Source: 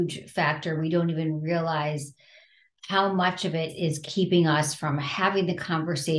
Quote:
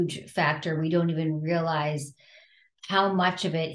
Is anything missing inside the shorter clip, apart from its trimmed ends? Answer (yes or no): no